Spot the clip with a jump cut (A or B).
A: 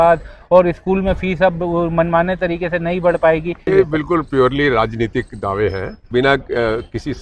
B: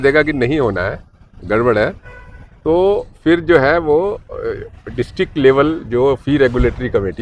A